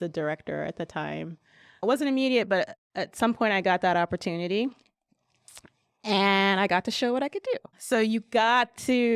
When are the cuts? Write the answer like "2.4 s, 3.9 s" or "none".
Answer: 1.8 s, 7.7 s